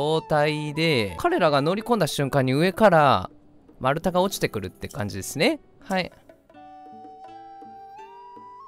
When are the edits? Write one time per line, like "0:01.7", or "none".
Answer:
0:01.2
0:05.7